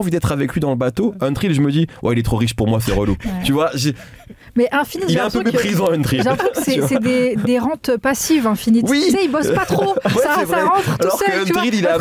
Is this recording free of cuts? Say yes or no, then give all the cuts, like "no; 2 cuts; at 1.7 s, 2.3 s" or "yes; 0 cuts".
yes; 0 cuts